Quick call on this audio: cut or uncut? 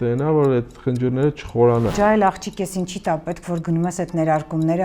cut